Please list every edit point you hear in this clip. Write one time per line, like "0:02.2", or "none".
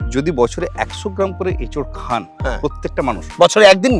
none